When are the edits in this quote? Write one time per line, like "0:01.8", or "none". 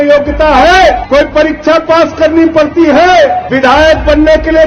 0:01.0
0:03.5